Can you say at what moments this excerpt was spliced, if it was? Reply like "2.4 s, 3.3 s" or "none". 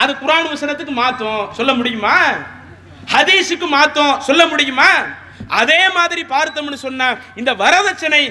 none

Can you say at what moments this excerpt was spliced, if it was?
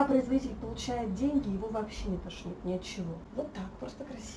3.2 s

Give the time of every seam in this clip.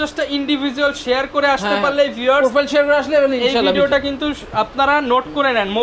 none

